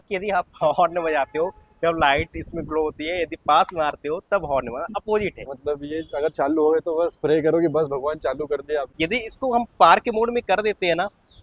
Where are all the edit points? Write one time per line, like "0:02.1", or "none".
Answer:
0:05.5
0:08.9

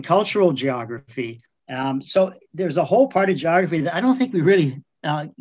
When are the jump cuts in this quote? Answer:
none

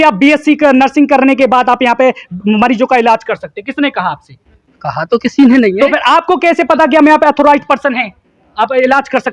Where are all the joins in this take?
none

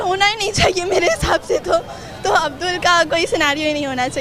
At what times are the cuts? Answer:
none

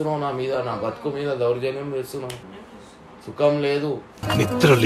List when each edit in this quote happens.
0:02.5

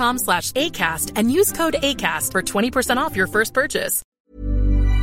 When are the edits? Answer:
0:04.0

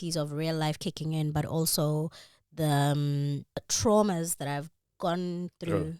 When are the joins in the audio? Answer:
0:03.7

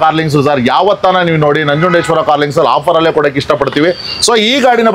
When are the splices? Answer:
none

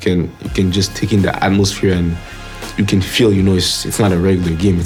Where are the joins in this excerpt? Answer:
none

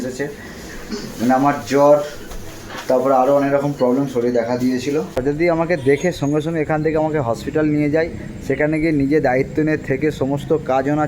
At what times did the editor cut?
0:05.2

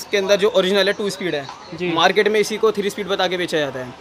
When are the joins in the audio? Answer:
none

